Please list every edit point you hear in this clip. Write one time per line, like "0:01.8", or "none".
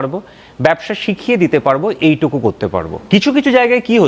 0:02.9